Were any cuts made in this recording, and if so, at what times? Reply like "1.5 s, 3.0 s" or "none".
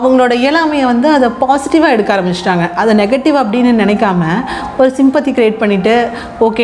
none